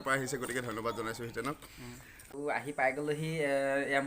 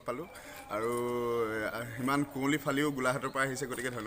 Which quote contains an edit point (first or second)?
first